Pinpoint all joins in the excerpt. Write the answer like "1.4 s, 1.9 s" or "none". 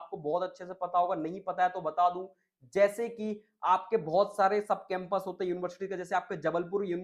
none